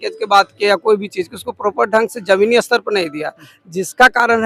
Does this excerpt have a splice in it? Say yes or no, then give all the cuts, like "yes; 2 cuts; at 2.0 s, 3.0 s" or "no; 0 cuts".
no; 0 cuts